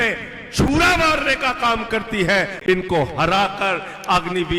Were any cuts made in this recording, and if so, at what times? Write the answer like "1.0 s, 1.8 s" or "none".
2.6 s